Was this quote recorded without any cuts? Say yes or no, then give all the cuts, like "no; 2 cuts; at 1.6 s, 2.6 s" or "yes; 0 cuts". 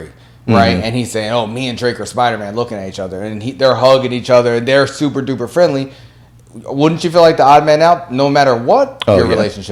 yes; 0 cuts